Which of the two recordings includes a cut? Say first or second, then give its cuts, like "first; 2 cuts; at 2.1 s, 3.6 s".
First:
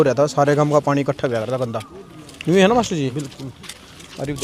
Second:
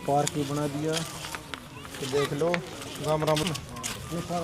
second; 1 cut; at 3.4 s